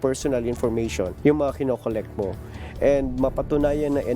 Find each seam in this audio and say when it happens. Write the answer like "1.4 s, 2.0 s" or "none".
1.1 s